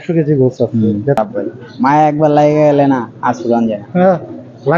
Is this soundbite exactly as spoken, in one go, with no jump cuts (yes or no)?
no